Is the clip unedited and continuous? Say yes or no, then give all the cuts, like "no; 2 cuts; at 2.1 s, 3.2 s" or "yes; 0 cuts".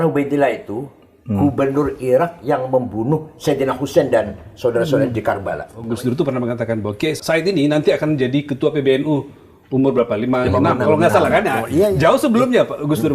no; 2 cuts; at 5.7 s, 7.2 s